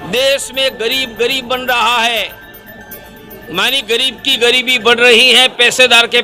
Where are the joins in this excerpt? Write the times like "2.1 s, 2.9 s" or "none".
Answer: none